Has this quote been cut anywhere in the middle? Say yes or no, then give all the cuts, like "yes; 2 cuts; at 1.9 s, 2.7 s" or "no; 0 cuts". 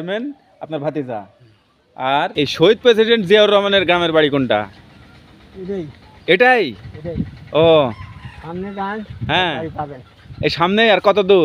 yes; 1 cut; at 2.3 s